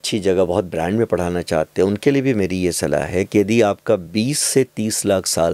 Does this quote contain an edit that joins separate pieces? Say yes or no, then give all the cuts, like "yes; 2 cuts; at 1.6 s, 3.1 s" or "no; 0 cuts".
no; 0 cuts